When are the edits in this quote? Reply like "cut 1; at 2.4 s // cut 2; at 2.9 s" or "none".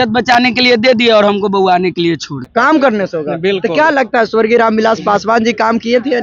cut 1; at 2.4 s